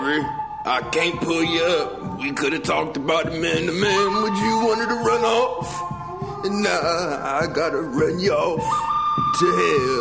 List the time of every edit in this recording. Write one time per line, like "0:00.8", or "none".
none